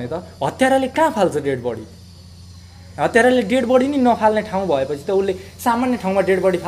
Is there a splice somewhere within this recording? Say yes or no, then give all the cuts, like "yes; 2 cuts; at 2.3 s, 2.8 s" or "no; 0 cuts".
no; 0 cuts